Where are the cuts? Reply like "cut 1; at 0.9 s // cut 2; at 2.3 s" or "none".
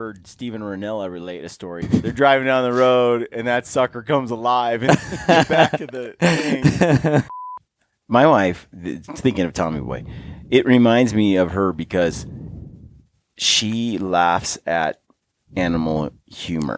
cut 1; at 1.8 s // cut 2; at 7.4 s